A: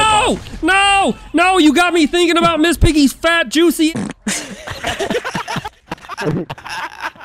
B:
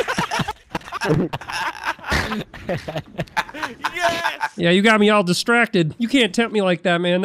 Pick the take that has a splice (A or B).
B